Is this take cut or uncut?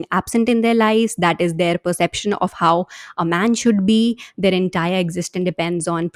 uncut